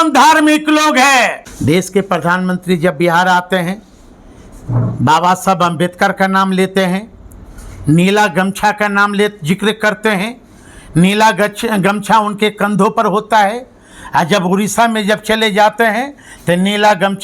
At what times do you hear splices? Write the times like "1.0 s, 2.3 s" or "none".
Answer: 1.5 s